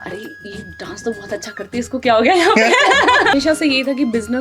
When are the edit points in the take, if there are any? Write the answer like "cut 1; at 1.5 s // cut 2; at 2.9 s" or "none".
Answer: cut 1; at 3.3 s